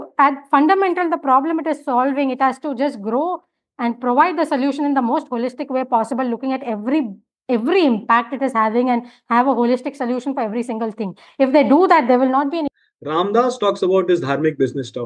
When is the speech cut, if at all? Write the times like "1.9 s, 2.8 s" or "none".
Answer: 12.6 s